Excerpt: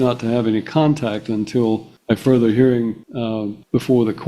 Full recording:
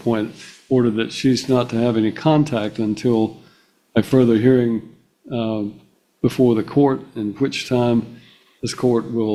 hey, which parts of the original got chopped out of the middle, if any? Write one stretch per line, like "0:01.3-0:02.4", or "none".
0:03.4-0:03.8
0:05.2-0:05.8